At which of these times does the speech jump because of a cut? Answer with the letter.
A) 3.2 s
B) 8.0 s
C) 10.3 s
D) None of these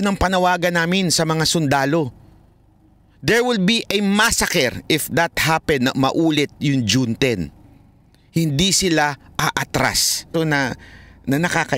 C